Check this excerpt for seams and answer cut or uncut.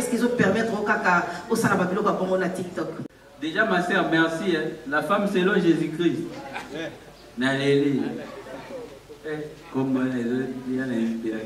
cut